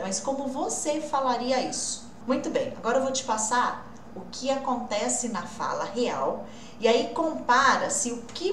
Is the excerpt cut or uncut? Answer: cut